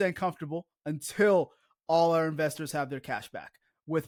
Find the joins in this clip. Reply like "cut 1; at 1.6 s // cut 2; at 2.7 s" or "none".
none